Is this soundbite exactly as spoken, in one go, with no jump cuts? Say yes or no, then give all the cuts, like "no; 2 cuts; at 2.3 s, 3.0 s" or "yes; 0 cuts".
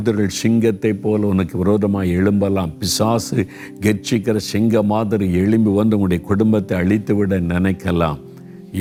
yes; 0 cuts